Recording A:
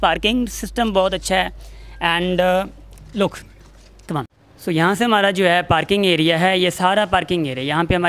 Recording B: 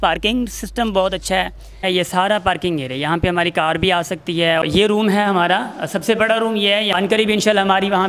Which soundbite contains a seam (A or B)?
B